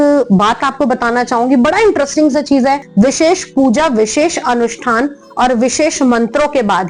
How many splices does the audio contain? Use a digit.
1